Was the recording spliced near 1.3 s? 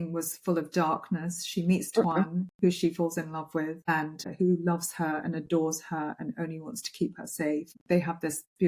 no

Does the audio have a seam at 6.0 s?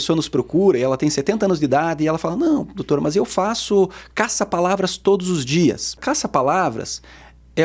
yes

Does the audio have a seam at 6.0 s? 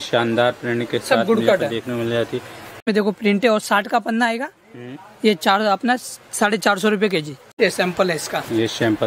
no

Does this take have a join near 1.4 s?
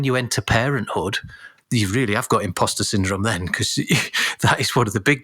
yes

